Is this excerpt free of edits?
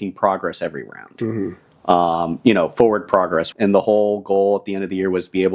no; 1 cut; at 3.5 s

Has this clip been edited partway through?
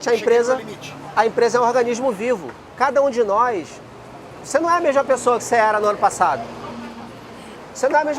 yes; 1 cut; at 2.6 s

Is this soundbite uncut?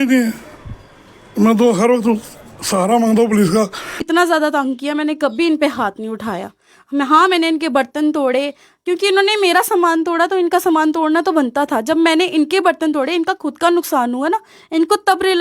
no; 1 cut; at 4.0 s

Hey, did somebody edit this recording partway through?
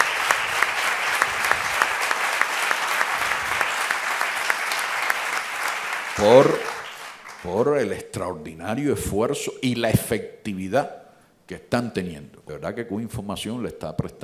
yes; 1 cut; at 12.3 s

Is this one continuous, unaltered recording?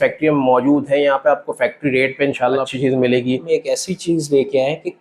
no; 2 cuts; at 2.7 s, 3.4 s

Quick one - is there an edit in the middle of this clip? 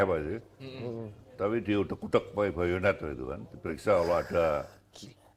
no; 0 cuts

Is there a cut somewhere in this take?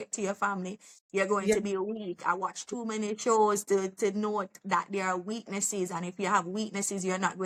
no; 0 cuts

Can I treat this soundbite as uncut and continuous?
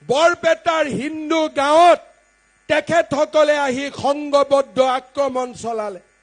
yes; 0 cuts

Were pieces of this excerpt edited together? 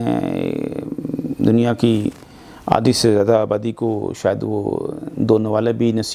no; 0 cuts

